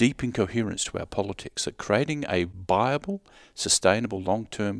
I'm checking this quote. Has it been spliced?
yes; 1 cut; at 2.6 s

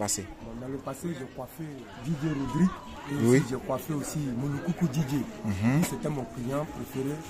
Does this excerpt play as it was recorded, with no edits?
no; 1 cut; at 1.8 s

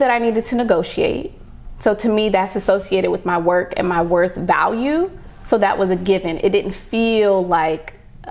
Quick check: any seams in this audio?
no; 0 cuts

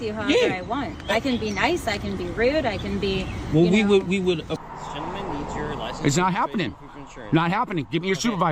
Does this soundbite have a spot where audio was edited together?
yes; 1 cut; at 4.5 s

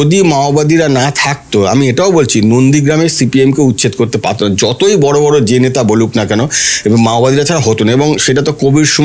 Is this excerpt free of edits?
yes; 0 cuts

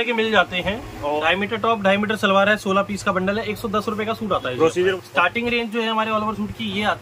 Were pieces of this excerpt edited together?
yes; 2 cuts; at 1.2 s, 4.9 s

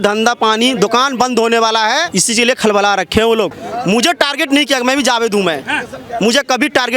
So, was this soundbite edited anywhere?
yes; 1 cut; at 3.6 s

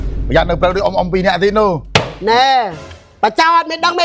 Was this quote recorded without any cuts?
yes; 0 cuts

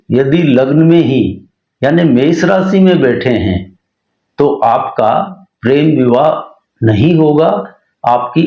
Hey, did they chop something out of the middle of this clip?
no; 0 cuts

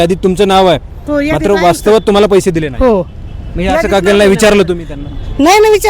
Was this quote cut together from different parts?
no; 0 cuts

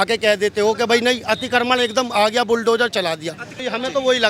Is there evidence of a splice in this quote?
no; 0 cuts

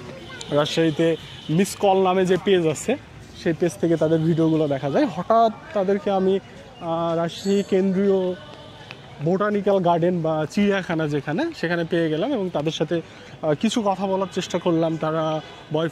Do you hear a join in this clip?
no; 0 cuts

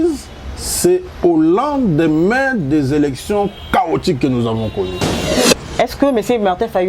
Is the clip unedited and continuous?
no; 1 cut; at 5.4 s

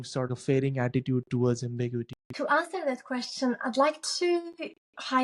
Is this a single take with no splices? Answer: yes; 0 cuts

